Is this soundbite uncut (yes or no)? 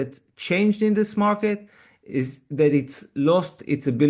yes